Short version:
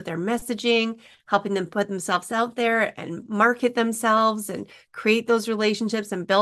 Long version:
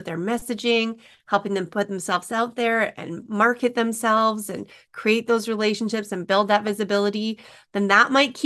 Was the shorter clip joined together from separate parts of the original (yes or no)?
no